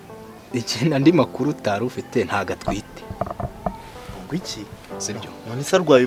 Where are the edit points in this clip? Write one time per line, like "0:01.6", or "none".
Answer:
0:04.9